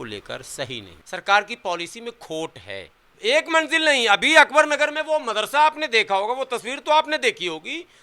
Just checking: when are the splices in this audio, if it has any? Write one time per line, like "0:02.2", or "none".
0:00.9
0:03.0